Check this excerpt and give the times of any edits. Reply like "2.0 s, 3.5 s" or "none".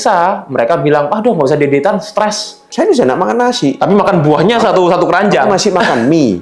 2.6 s